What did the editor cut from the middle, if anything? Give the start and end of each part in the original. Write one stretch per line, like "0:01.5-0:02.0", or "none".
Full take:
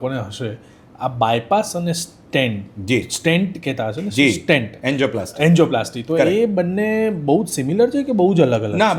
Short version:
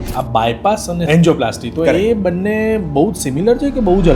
0:01.9-0:05.3